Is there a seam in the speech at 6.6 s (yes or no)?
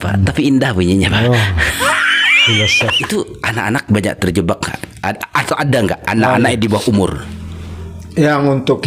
no